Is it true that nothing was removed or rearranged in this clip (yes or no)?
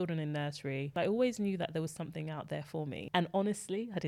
no